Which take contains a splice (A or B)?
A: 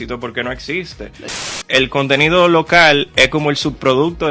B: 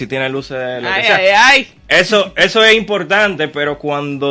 A